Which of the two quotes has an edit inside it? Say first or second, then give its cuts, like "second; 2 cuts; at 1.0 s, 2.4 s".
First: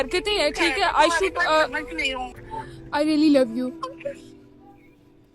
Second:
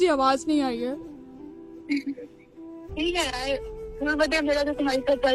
first; 2 cuts; at 2.4 s, 4.1 s